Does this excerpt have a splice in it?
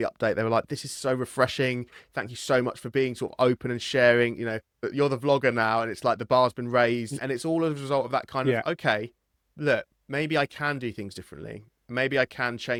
no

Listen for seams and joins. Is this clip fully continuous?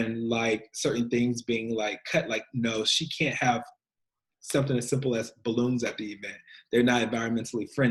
yes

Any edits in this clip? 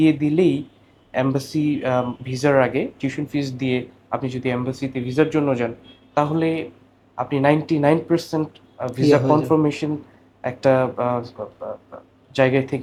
no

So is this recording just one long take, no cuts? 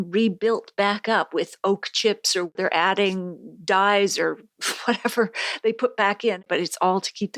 no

